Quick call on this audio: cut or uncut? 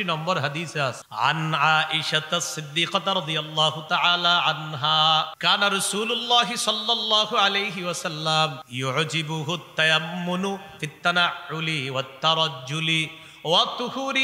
cut